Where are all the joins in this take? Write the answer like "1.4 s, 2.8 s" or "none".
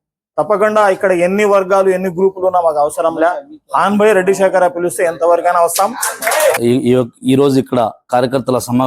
6.6 s